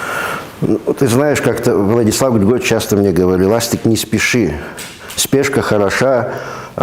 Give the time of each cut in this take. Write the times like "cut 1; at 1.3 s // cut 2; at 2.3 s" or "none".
none